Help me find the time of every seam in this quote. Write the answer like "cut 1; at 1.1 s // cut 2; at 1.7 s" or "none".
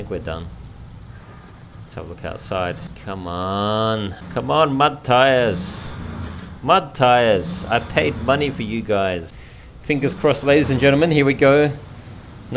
cut 1; at 2.9 s // cut 2; at 4.2 s // cut 3; at 9.4 s